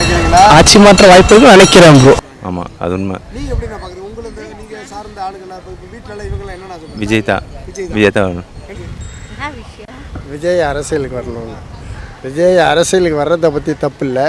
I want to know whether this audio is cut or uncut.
cut